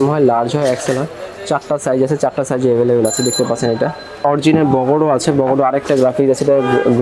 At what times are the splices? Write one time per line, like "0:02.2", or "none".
0:04.2